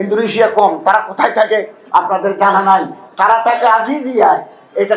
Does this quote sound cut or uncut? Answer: uncut